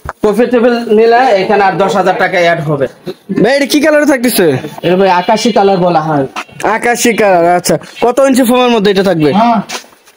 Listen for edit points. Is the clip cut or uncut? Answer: cut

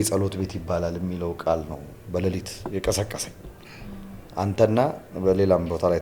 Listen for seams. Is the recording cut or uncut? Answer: uncut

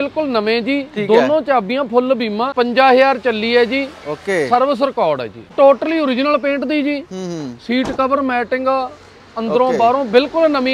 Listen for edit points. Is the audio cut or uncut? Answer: cut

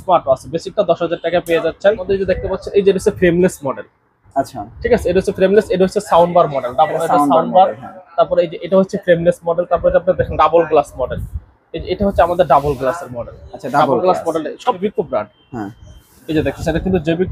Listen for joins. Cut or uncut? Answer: cut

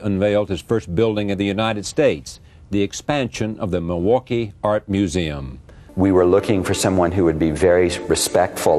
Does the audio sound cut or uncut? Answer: uncut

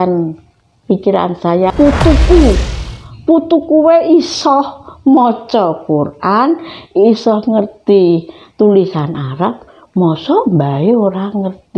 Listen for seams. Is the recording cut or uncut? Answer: cut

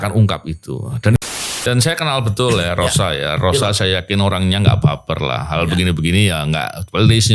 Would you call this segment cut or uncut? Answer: cut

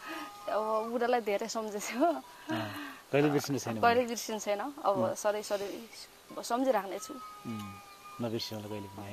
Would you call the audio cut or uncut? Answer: uncut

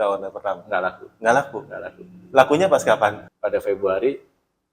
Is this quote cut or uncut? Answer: cut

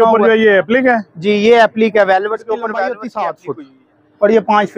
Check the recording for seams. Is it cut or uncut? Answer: cut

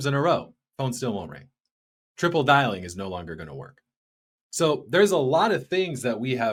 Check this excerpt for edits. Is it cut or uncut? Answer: uncut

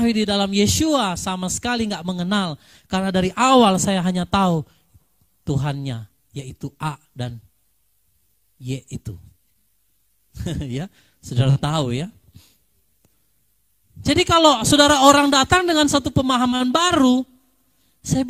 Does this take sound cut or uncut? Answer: uncut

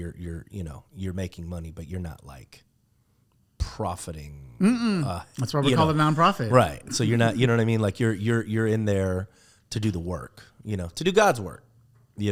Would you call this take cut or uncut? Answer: uncut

